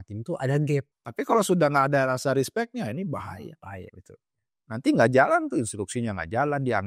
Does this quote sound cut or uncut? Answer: cut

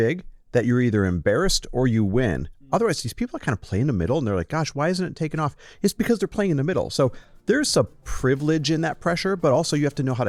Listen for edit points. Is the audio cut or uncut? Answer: uncut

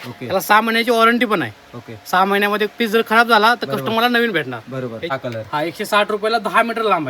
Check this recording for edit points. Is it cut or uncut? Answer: cut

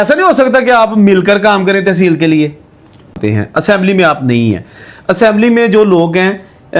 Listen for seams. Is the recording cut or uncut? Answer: cut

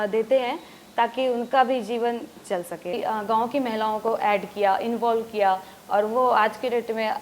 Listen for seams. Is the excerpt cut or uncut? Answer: cut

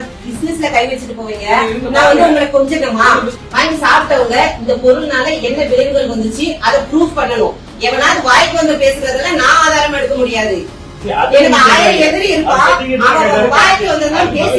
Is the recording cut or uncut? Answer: cut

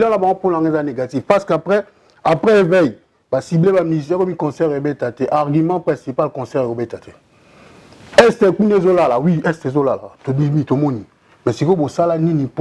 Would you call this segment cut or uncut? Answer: uncut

